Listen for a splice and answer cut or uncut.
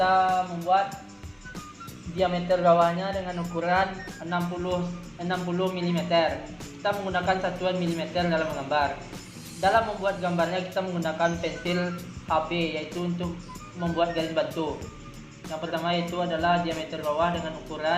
uncut